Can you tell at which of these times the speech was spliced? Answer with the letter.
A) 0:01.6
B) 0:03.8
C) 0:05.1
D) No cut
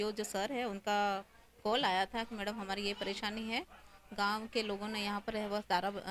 D